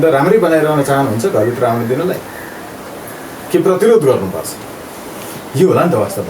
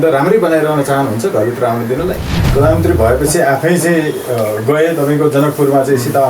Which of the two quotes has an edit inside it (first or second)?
second